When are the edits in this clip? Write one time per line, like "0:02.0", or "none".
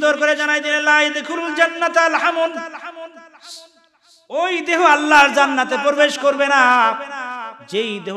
none

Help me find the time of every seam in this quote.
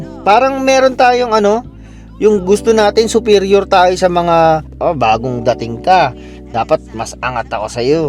none

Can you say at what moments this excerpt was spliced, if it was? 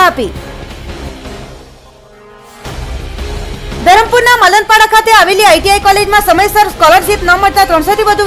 none

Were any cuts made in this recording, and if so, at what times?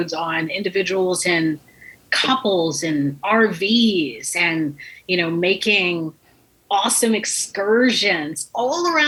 none

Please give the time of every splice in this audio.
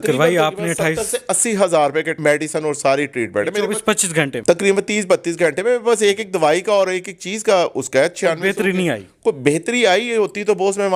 none

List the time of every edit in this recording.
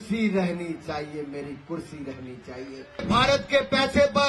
0:03.0

